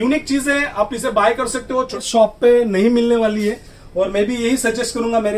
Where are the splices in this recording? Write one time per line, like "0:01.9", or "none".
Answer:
0:02.0